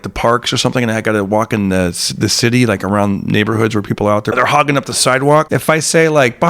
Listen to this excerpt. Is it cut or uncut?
cut